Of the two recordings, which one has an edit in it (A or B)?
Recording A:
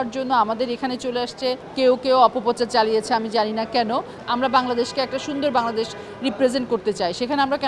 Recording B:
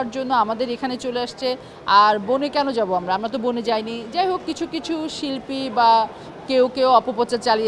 A